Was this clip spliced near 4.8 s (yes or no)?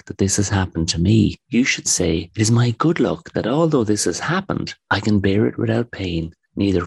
no